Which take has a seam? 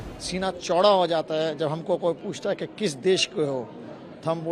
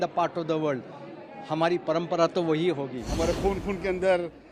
second; 1 cut; at 3.0 s

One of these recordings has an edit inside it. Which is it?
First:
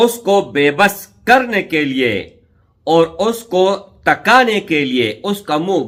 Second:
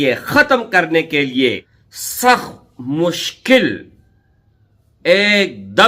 second; 1 cut; at 1.5 s

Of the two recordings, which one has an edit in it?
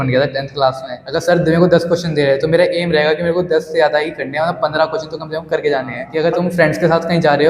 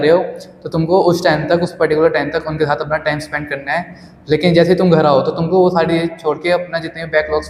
first; 2 cuts; at 0.9 s, 6.0 s

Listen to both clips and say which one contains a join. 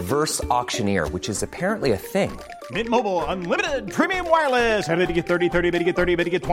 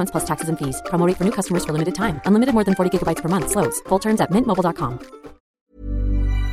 second; 1 cut; at 5.6 s

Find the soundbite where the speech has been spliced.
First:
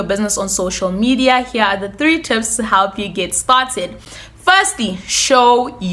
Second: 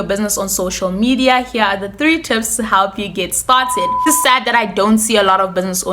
second; 1 cut; at 4.0 s

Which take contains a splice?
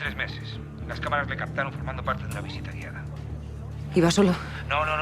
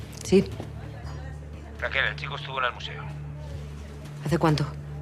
first; 1 cut; at 3.5 s

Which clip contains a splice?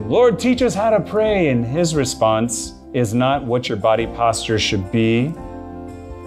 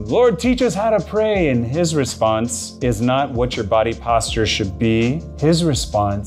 second; 2 cuts; at 2.6 s, 5.3 s

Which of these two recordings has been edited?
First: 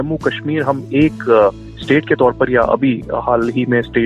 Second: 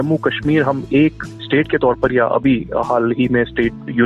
second; 1 cut; at 1.2 s

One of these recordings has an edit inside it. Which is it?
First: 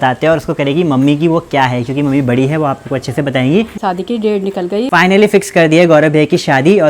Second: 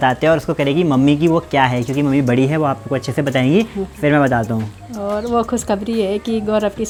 first; 2 cuts; at 3.7 s, 4.9 s

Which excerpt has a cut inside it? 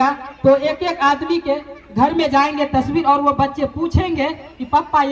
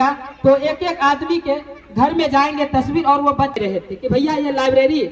second; 1 cut; at 3.6 s

